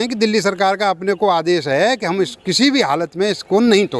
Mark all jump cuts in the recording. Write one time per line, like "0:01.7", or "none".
none